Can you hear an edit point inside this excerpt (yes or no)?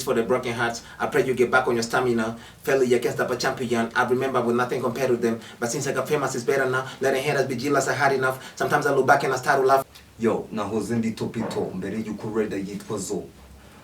yes